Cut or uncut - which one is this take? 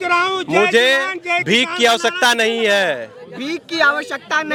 uncut